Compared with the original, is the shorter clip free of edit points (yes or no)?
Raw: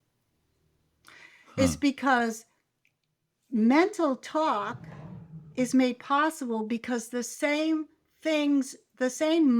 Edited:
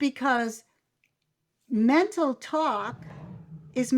yes